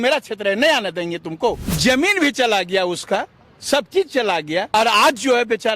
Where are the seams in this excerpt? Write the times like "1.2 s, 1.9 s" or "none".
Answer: 1.7 s, 4.7 s